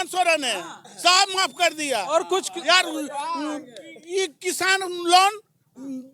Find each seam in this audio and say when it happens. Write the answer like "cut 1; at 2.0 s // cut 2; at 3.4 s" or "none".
none